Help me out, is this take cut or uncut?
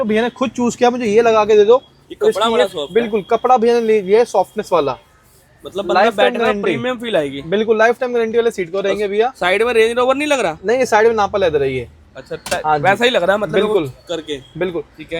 uncut